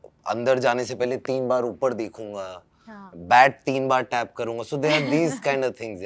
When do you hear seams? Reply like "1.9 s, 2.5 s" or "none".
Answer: none